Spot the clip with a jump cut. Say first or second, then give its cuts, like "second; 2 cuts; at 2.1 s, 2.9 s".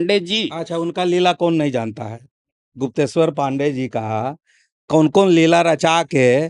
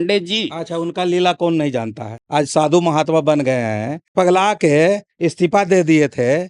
second; 2 cuts; at 2.2 s, 4.0 s